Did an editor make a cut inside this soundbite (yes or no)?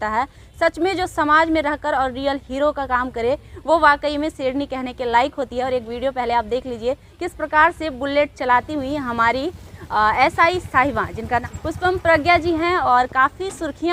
no